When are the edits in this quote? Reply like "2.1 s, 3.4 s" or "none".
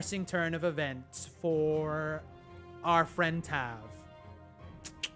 4.2 s